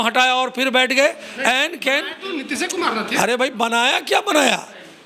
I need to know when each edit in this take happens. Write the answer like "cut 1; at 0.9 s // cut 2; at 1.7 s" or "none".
none